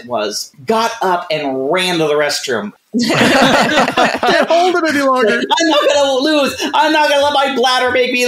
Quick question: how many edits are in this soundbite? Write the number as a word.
one